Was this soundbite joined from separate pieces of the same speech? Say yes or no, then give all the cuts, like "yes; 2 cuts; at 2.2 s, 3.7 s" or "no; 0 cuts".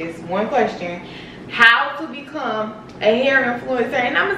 no; 0 cuts